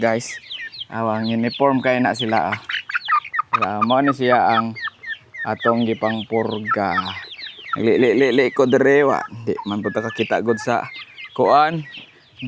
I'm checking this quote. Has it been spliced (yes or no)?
no